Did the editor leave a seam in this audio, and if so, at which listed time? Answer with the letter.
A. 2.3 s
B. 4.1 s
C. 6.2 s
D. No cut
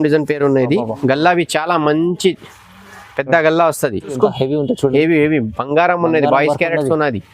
B